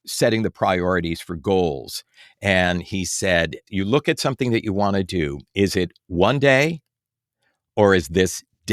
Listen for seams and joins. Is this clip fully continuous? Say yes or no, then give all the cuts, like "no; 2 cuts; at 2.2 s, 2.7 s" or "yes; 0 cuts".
no; 1 cut; at 3.7 s